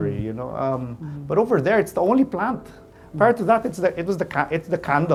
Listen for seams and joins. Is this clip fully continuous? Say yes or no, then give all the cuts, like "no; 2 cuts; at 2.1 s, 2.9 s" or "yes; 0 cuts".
yes; 0 cuts